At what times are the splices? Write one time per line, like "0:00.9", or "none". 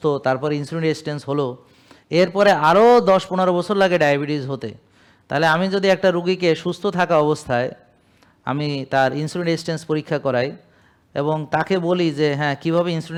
none